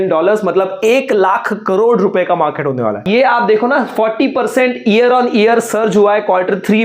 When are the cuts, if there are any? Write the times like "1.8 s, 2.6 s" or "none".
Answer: 3.0 s